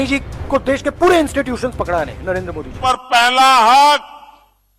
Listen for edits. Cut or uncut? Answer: cut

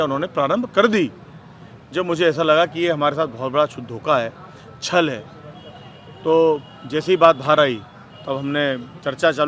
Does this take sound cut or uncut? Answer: uncut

